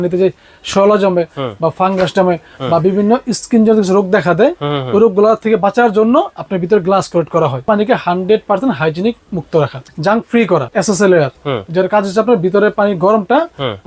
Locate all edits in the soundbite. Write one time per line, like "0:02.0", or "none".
0:07.7
0:09.8
0:10.7